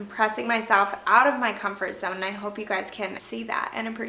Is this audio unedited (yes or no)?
no